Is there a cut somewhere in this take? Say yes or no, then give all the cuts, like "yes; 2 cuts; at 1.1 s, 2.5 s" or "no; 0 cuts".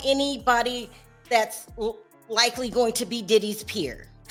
no; 0 cuts